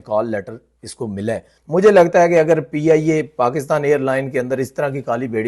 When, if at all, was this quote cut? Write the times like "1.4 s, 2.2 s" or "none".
1.5 s